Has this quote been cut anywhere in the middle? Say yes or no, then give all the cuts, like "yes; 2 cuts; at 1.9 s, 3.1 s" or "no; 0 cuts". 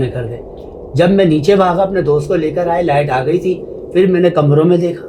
no; 0 cuts